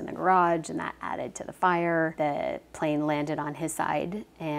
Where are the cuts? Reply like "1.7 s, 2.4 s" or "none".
2.1 s